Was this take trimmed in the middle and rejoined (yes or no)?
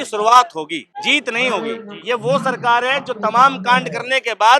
yes